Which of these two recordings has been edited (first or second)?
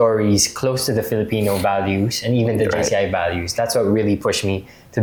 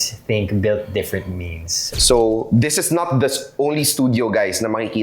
second